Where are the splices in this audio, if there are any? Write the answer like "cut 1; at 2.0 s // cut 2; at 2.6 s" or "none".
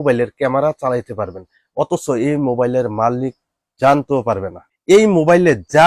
cut 1; at 4.6 s